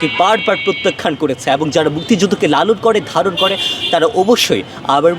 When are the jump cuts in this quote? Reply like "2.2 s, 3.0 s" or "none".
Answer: none